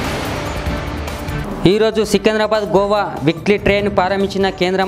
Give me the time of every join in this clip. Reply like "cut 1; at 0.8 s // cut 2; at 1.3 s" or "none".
cut 1; at 1.4 s